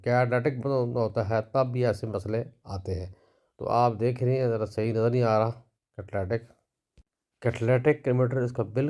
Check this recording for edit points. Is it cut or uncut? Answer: uncut